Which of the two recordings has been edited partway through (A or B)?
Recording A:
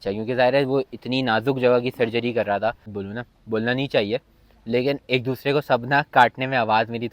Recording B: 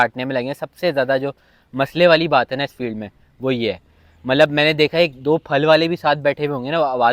A